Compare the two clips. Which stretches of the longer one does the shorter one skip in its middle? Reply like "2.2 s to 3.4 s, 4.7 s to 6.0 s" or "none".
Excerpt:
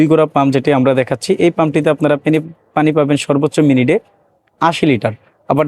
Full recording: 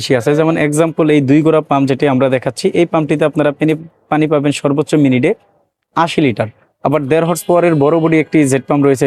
none